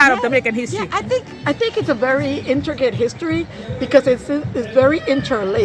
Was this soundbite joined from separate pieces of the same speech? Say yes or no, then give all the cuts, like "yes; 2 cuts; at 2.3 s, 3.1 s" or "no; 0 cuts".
no; 0 cuts